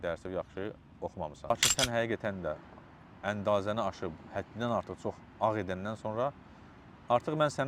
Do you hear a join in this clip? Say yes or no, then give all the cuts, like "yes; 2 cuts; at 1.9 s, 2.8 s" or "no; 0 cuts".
yes; 1 cut; at 1.5 s